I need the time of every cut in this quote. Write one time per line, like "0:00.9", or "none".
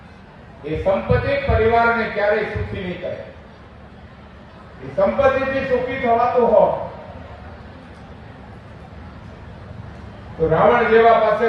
none